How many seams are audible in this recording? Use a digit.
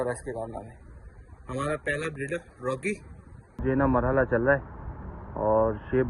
1